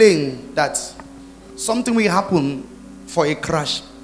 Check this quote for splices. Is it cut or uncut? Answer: uncut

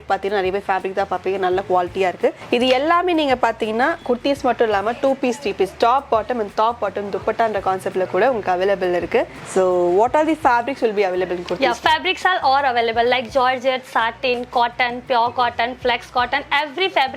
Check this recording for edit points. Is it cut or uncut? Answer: cut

